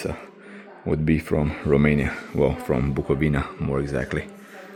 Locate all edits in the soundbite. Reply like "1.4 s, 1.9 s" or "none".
none